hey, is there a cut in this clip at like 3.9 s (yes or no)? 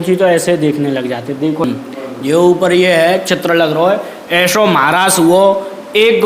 no